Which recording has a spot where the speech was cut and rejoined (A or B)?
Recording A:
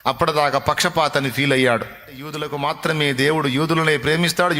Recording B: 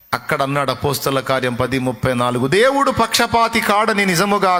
A